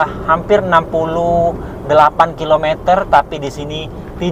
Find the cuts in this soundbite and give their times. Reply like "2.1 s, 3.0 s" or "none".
none